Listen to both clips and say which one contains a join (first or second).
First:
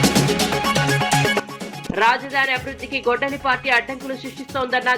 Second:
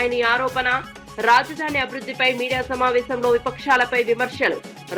first